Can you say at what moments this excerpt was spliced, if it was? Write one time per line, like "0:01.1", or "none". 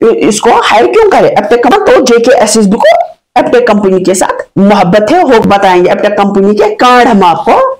0:01.7
0:05.4
0:06.4